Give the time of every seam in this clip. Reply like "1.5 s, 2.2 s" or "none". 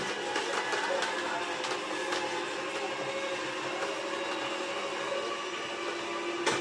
none